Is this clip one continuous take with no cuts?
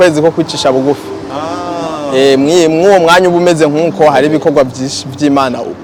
yes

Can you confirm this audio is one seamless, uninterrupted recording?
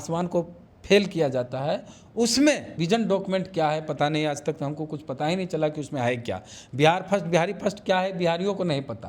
no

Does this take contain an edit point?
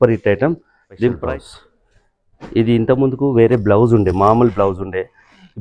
yes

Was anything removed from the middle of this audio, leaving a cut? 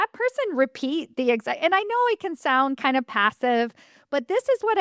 no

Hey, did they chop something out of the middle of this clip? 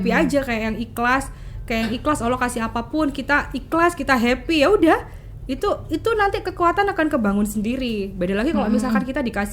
no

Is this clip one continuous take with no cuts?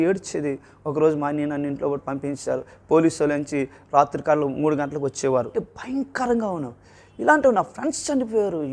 no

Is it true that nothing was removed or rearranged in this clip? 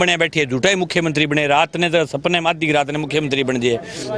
yes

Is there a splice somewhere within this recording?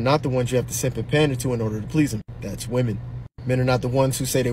yes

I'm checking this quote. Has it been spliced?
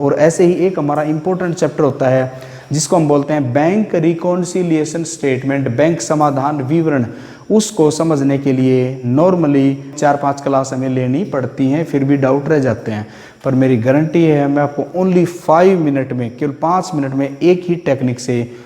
yes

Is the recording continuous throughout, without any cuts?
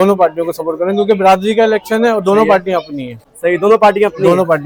yes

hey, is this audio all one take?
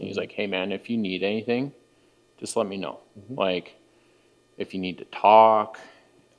yes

